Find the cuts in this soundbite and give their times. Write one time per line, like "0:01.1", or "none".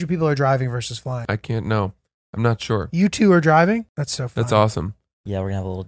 0:01.2
0:04.0